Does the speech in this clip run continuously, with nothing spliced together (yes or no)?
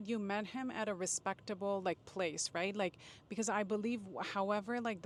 yes